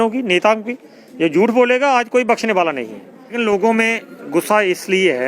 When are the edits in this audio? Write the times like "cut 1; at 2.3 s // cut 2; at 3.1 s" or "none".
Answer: cut 1; at 3.3 s